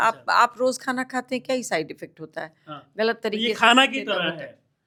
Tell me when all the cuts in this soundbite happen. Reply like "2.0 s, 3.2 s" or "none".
none